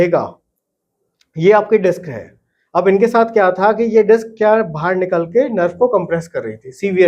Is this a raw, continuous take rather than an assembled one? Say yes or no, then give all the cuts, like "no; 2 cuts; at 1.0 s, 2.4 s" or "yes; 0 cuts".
yes; 0 cuts